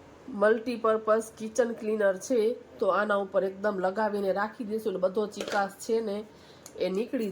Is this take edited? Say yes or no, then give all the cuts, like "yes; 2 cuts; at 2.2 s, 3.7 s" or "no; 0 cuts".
no; 0 cuts